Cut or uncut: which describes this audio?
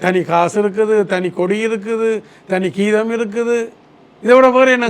uncut